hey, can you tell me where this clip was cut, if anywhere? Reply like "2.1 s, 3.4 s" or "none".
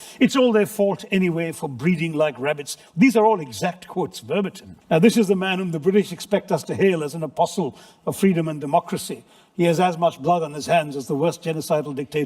4.7 s